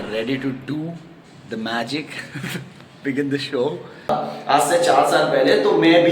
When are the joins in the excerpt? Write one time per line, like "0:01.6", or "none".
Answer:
0:04.1